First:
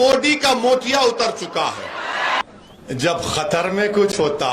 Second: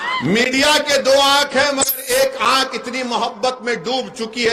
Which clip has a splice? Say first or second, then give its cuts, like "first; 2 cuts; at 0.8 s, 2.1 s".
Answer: first; 1 cut; at 2.4 s